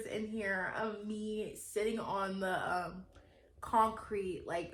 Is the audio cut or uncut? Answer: uncut